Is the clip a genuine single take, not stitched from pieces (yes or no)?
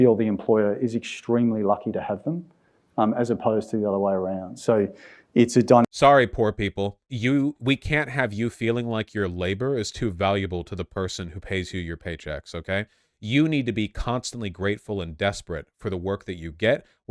yes